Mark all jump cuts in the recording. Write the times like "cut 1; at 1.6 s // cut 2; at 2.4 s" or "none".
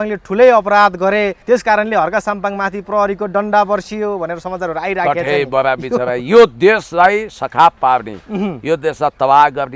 cut 1; at 1.4 s

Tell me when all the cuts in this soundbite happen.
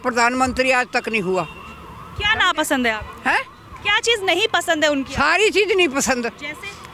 none

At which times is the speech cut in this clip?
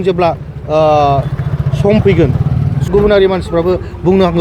cut 1; at 2.9 s

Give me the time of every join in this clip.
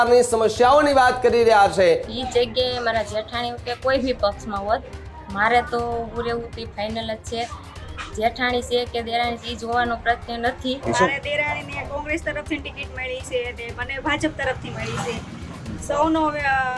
cut 1; at 2.1 s // cut 2; at 10.8 s

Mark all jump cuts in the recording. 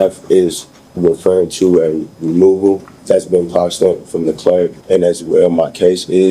cut 1; at 2.9 s // cut 2; at 4.8 s

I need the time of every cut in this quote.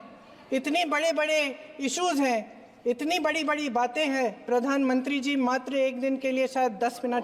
none

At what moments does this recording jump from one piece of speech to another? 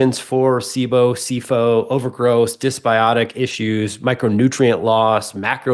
none

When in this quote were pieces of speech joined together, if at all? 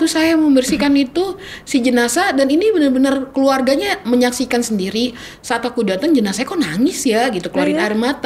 none

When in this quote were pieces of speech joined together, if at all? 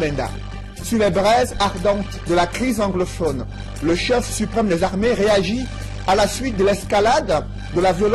cut 1; at 1.4 s

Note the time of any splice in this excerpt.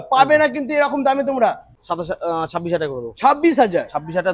cut 1; at 1.7 s

